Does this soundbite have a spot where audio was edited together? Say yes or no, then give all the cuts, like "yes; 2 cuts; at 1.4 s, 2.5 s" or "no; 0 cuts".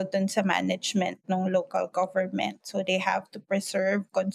no; 0 cuts